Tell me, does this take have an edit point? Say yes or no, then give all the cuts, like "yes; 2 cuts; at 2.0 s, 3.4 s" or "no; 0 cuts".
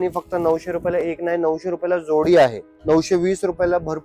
yes; 1 cut; at 2.7 s